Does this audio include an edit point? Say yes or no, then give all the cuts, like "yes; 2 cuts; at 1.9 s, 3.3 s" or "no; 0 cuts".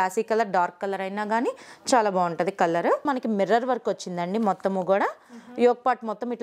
yes; 1 cut; at 3.0 s